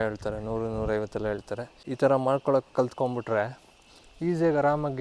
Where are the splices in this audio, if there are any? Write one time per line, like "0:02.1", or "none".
0:01.8